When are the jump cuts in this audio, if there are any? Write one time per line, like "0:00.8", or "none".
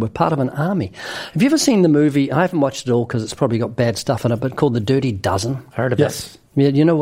0:05.8